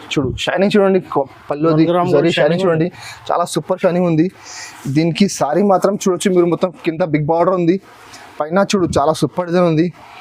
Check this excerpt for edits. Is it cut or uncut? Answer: uncut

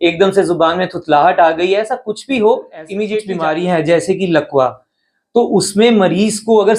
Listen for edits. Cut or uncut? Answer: cut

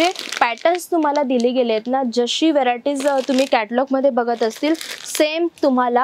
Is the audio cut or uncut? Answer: uncut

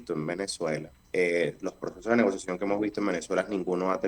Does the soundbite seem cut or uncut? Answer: cut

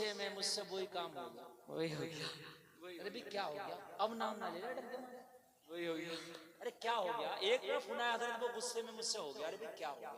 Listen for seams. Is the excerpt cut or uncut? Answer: uncut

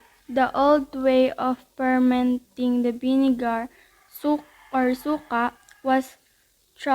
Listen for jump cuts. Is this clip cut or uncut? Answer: cut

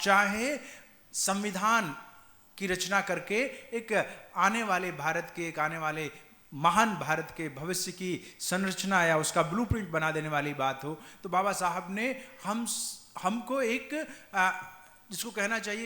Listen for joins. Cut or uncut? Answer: uncut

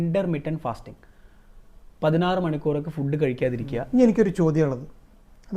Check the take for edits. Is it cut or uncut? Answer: cut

